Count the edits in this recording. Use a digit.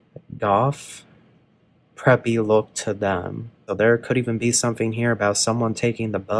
1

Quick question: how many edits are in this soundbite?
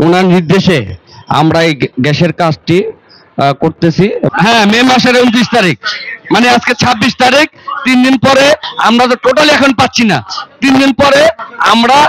1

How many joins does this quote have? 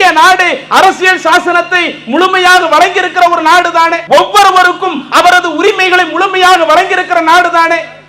1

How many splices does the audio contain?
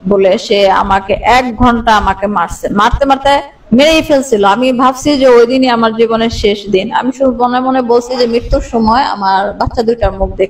0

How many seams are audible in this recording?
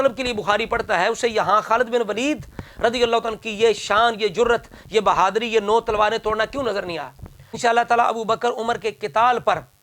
1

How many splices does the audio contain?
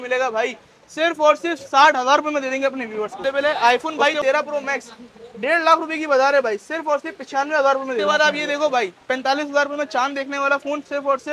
2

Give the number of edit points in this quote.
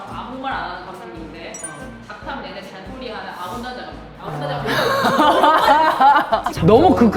0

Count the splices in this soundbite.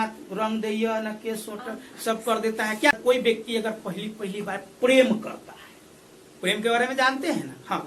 1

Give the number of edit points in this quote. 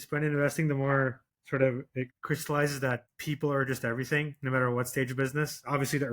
2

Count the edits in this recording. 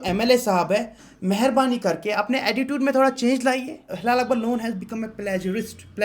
1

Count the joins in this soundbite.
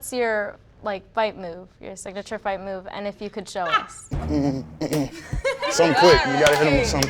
1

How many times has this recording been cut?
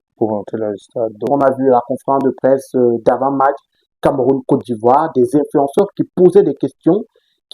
1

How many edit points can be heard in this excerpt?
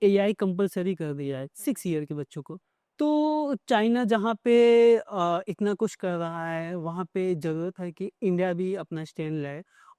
0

